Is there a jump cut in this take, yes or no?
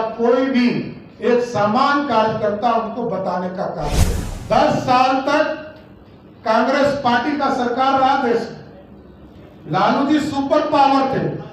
yes